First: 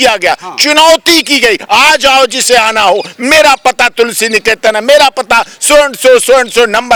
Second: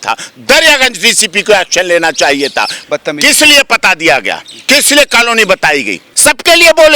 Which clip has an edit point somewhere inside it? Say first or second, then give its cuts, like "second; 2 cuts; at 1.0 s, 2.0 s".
second; 2 cuts; at 2.8 s, 6.1 s